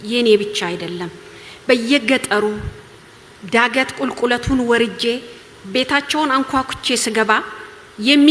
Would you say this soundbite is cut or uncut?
uncut